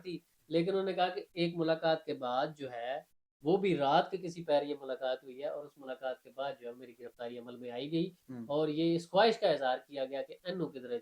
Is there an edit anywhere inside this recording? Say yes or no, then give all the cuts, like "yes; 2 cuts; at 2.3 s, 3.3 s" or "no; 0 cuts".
no; 0 cuts